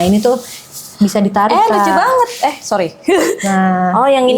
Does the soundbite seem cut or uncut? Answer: uncut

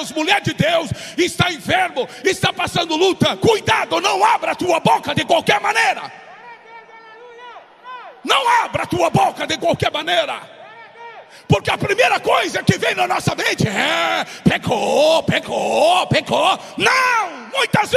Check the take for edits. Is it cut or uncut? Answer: uncut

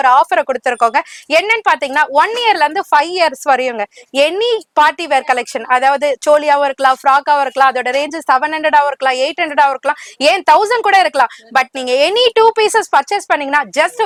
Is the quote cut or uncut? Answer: uncut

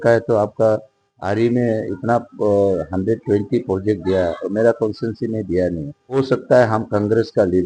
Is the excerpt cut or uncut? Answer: cut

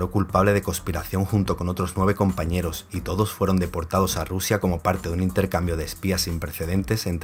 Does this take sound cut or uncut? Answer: uncut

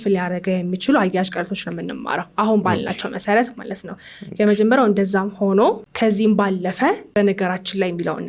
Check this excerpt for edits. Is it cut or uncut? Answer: cut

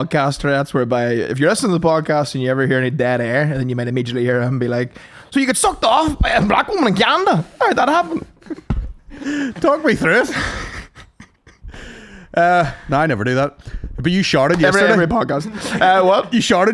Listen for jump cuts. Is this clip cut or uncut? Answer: uncut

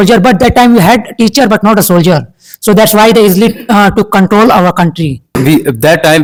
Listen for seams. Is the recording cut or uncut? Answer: uncut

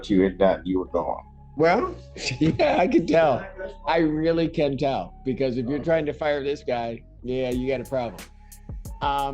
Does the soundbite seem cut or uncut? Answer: cut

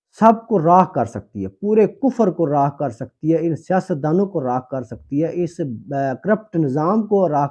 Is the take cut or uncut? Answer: uncut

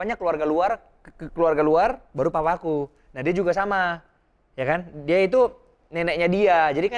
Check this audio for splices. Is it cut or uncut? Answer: uncut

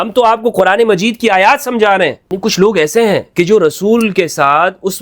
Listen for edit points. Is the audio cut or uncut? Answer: cut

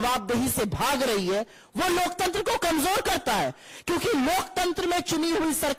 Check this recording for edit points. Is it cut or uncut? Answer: uncut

